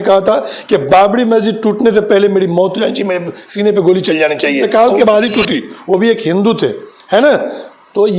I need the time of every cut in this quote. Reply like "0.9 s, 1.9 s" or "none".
4.6 s